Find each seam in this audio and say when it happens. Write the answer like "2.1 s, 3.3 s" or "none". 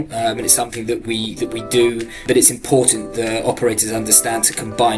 2.2 s